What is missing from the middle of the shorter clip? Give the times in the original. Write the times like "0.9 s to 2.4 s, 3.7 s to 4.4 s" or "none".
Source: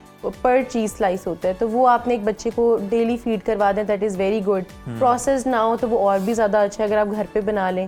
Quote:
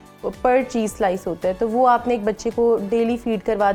none

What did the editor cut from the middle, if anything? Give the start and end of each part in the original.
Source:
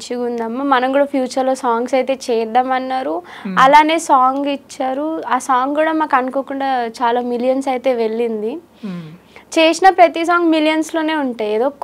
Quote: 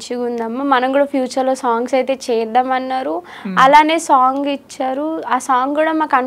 none

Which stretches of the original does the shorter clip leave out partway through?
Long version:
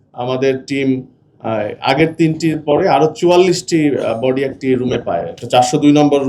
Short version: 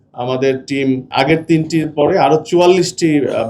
1.1 s to 1.8 s

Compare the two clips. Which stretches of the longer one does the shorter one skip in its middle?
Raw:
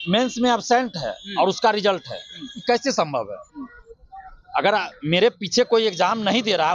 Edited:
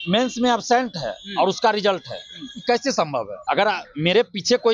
3.3 s to 4.4 s

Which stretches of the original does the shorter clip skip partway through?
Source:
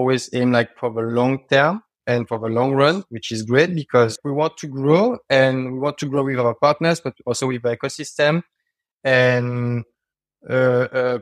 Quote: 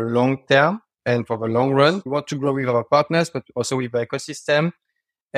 3.1 s to 5.8 s

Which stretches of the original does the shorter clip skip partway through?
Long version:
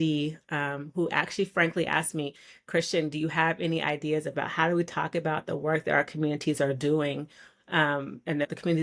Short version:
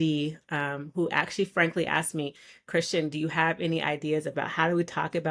none

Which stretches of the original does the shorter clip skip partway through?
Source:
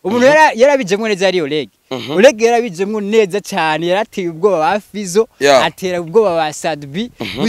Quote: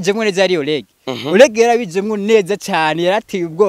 none

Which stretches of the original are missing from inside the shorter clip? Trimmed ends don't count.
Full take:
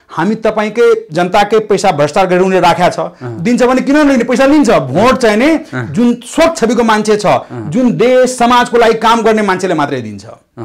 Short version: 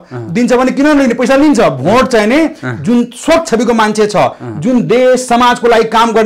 none

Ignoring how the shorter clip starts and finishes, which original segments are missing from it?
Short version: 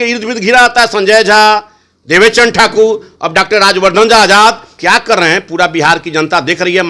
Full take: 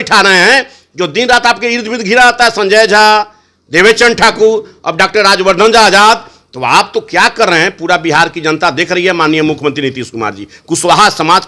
6.3 s to 7.0 s

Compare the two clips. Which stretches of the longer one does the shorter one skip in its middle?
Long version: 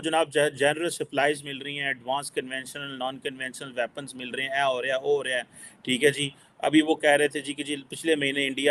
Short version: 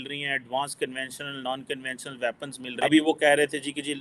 4.2 s to 6.4 s

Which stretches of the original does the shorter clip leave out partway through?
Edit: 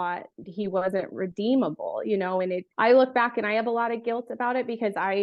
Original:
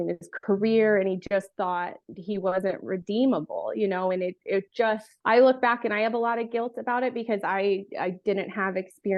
4.4 s to 5.1 s

